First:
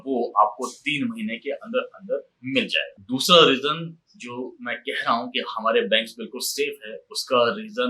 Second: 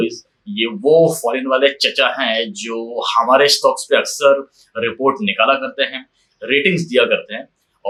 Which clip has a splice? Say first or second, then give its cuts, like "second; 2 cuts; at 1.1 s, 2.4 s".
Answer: first; 1 cut; at 2.9 s